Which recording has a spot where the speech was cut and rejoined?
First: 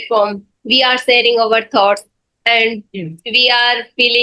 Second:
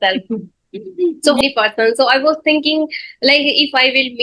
second; 1 cut; at 1.4 s

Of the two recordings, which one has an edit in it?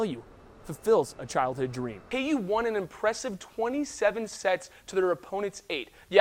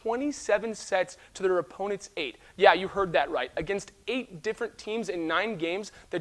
first; 1 cut; at 1.9 s

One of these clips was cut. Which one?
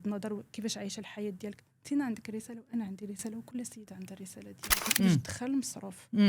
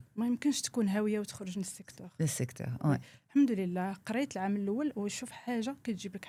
first; 1 cut; at 4.8 s

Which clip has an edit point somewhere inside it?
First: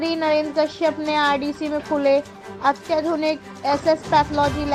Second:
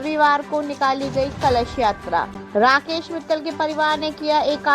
second; 1 cut; at 2.4 s

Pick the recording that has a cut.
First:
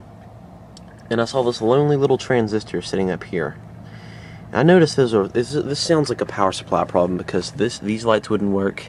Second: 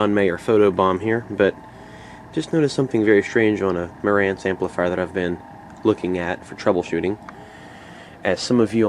second; 1 cut; at 3.3 s

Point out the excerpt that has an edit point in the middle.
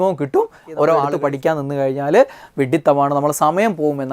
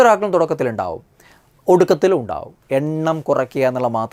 first; 1 cut; at 1.1 s

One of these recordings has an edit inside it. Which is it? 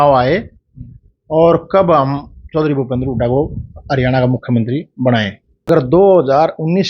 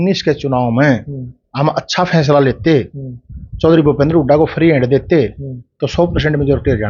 first; 1 cut; at 5.7 s

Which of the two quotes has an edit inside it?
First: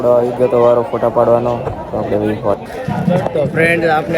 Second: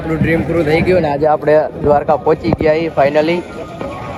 first; 1 cut; at 2.7 s

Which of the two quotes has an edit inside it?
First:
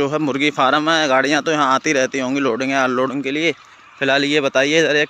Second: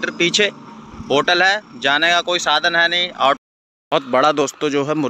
second; 1 cut; at 3.4 s

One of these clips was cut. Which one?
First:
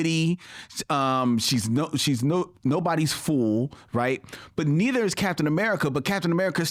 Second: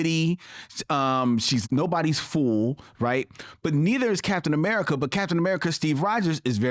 second; 1 cut; at 1.6 s

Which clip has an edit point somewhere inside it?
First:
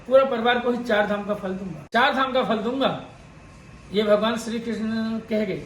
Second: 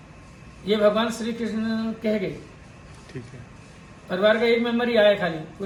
first; 1 cut; at 1.7 s

